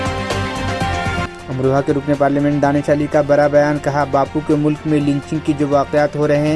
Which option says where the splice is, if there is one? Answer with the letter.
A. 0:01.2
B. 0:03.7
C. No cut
A